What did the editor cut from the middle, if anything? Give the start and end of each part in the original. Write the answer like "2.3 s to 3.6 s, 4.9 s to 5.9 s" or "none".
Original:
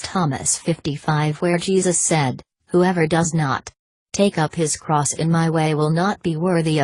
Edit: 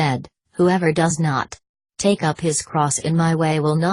none

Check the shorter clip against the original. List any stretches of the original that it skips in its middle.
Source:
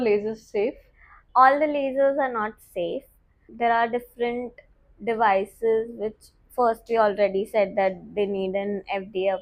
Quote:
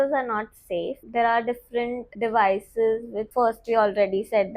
3.0 s to 3.4 s, 4.5 s to 4.9 s, 6.0 s to 6.4 s

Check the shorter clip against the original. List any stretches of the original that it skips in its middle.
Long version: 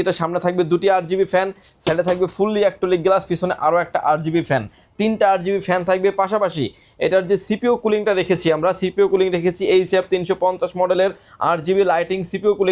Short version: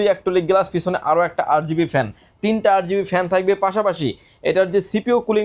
none

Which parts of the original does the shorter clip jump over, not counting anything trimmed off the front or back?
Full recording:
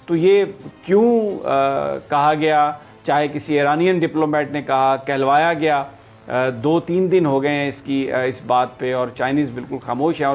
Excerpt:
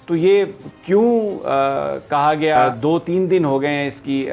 2.7 s to 6.5 s

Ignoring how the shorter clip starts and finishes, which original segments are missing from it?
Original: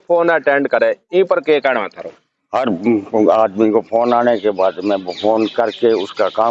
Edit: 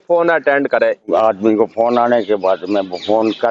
1.1 s to 3.3 s

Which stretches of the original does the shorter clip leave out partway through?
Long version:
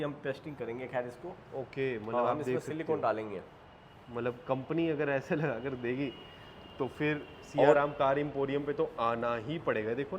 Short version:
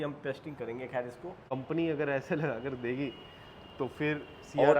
1.5 s to 4.5 s

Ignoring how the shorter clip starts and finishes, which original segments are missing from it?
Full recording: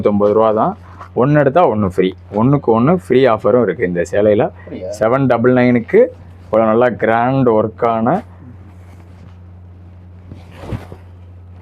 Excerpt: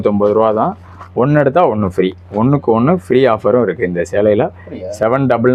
none

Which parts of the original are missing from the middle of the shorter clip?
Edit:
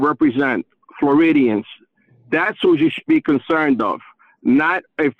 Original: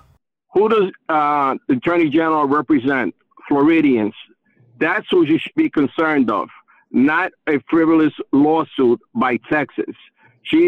none

